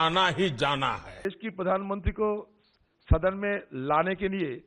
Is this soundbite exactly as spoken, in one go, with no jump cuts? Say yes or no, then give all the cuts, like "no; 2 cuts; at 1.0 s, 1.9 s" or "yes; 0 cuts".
yes; 0 cuts